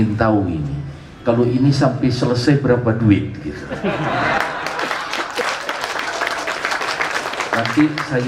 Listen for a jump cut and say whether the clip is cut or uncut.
uncut